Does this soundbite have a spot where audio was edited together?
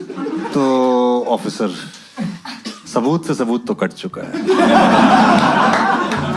no; 0 cuts

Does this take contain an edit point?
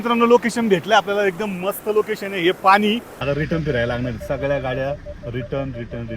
yes; 1 cut; at 3.1 s

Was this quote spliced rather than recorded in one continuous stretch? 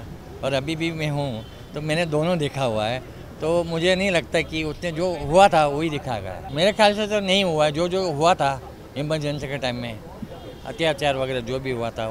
no; 0 cuts

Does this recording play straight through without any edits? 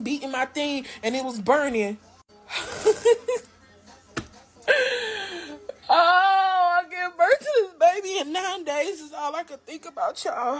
yes; 0 cuts

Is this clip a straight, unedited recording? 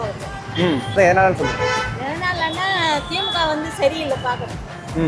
no; 1 cut; at 1.0 s

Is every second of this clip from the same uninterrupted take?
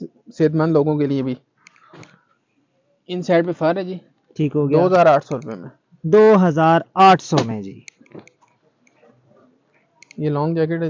yes; 0 cuts

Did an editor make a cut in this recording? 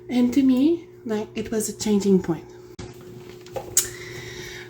yes; 1 cut; at 2.7 s

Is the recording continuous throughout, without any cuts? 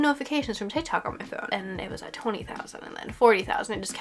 no; 1 cut; at 1.4 s

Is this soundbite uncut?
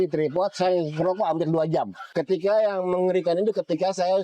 no; 1 cut; at 2.0 s

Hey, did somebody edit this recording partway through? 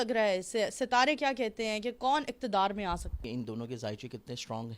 yes; 1 cut; at 3.2 s

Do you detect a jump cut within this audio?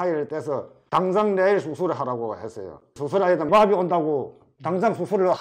yes; 1 cut; at 3.5 s

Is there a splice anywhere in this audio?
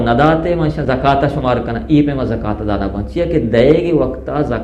no; 0 cuts

